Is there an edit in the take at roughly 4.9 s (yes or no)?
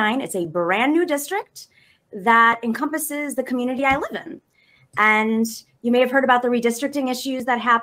no